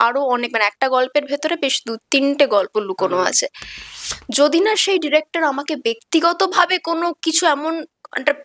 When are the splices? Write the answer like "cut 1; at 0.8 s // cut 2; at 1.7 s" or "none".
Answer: cut 1; at 3.9 s